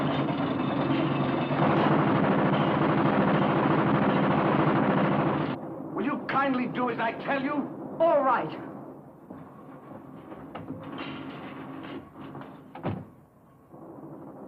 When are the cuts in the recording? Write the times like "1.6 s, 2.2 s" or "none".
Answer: none